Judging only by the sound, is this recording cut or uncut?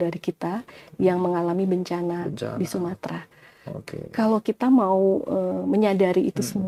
uncut